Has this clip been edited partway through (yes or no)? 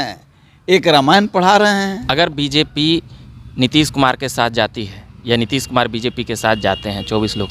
yes